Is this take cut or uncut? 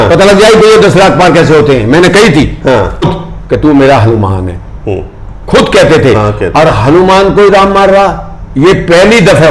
cut